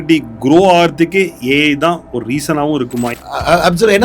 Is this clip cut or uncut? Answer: cut